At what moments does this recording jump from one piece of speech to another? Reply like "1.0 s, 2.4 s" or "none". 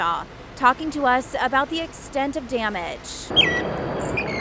3.3 s